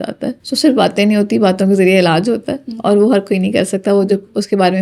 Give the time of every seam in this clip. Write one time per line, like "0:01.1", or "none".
none